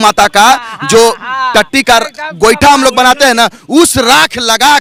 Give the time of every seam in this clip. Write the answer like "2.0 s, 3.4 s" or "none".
none